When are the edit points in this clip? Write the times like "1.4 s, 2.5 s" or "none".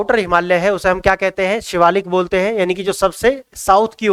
none